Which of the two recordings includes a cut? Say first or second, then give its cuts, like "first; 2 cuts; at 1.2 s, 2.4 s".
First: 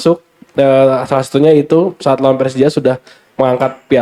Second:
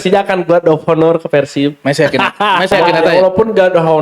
second; 1 cut; at 3.1 s